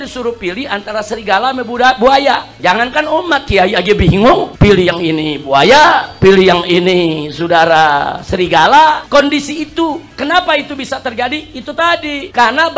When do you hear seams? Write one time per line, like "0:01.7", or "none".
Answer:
0:02.5